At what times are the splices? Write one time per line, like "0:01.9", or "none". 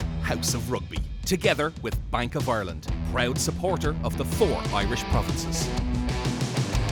none